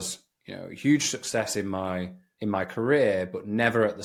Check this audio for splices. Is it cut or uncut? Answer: uncut